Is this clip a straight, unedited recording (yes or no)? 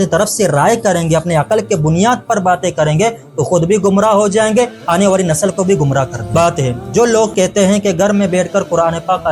no